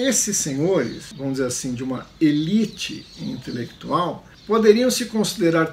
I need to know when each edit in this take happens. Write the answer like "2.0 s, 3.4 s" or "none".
1.0 s, 4.3 s